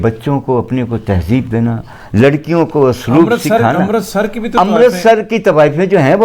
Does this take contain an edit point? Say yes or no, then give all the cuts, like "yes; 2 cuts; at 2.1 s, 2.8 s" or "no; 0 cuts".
no; 0 cuts